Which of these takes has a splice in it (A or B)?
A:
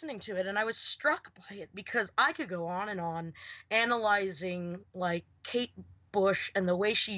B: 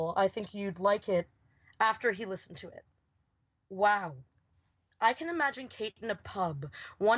B